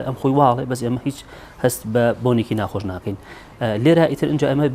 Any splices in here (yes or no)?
no